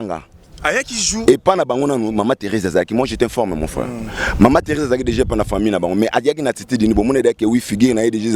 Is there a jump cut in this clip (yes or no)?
no